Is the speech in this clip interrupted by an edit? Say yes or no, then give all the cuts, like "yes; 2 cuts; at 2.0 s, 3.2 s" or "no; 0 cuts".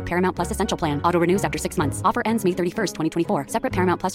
no; 0 cuts